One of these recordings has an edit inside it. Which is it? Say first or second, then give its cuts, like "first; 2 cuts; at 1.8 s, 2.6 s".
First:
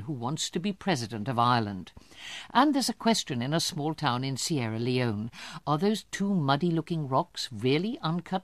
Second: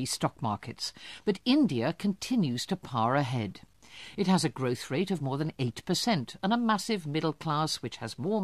second; 1 cut; at 2.5 s